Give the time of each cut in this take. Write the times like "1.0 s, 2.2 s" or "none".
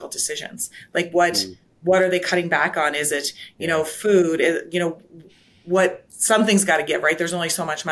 none

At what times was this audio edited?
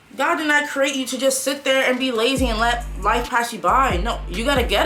none

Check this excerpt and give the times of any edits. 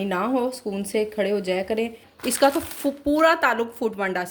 2.1 s

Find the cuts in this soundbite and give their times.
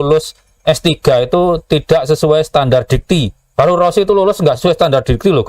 3.4 s

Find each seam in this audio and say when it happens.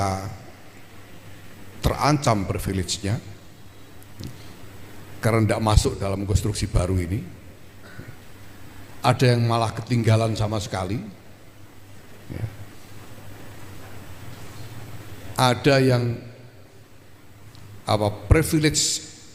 none

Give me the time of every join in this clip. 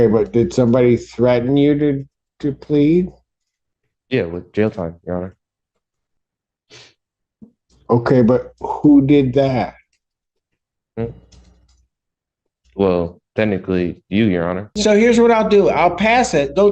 14.3 s

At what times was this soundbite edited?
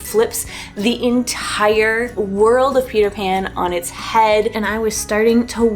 2.1 s, 4.6 s

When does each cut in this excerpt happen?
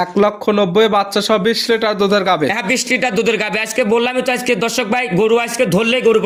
none

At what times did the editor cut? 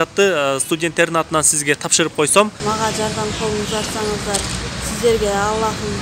2.6 s

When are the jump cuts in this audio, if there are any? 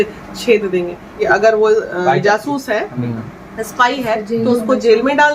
1.3 s

